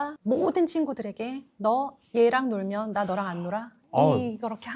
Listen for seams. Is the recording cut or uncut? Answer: uncut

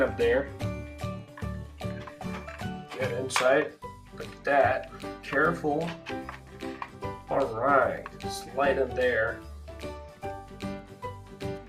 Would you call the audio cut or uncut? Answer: cut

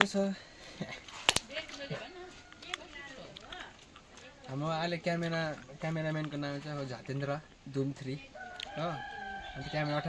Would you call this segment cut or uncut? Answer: uncut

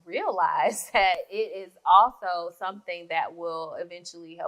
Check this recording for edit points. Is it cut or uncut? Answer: cut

